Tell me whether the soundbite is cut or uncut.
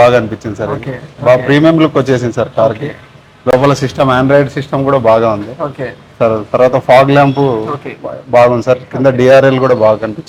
uncut